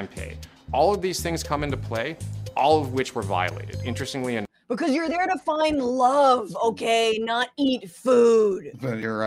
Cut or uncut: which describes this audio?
uncut